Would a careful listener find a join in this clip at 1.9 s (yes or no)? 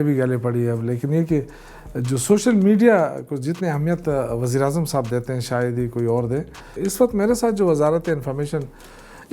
no